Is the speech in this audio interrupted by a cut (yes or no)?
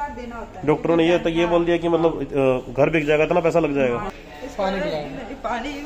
yes